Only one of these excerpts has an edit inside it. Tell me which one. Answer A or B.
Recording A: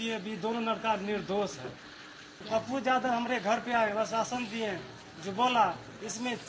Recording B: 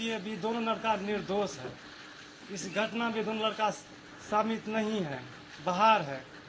A